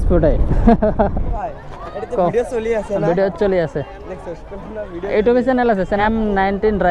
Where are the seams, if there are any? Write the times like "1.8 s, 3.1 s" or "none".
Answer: 1.3 s, 6.0 s